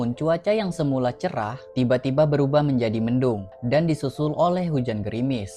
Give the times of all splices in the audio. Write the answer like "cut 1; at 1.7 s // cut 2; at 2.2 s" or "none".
cut 1; at 1.6 s // cut 2; at 3.5 s